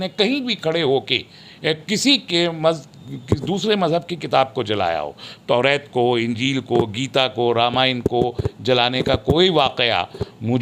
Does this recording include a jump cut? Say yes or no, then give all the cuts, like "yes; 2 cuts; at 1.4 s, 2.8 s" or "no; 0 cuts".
no; 0 cuts